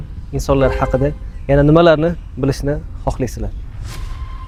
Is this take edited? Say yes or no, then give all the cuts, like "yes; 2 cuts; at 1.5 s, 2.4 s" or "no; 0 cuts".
no; 0 cuts